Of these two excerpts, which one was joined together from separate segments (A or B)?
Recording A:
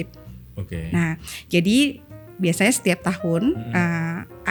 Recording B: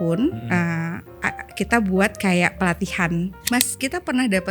B